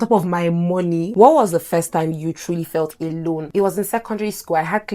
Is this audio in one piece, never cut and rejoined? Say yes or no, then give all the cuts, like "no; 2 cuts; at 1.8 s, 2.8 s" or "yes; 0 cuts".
no; 2 cuts; at 1.1 s, 3.5 s